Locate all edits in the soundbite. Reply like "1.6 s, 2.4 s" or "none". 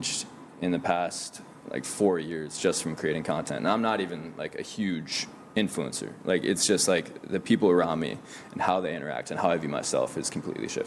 none